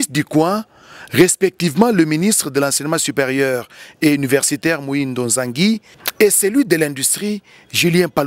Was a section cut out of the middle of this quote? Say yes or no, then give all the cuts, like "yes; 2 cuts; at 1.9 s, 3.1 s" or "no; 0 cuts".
yes; 1 cut; at 6.0 s